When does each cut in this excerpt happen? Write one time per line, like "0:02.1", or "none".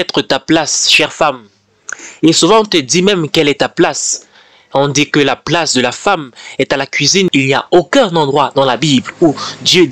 0:07.3